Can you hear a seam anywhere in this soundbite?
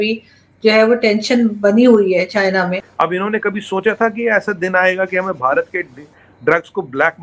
yes; 1 cut; at 2.9 s

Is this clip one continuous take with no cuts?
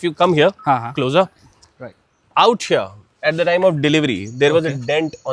yes; 0 cuts

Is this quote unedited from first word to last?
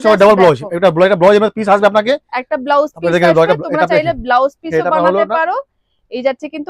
yes; 0 cuts

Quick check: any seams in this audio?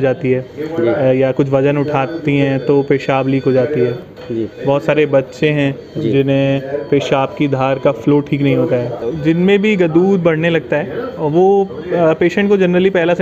yes; 1 cut; at 9.1 s

